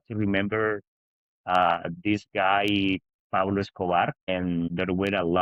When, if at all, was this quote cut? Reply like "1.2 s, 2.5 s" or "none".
none